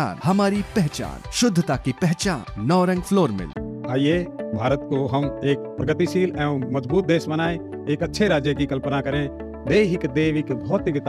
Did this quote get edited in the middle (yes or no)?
no